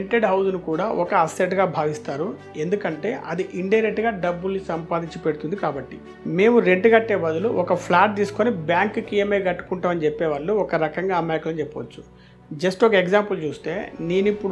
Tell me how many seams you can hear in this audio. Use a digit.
0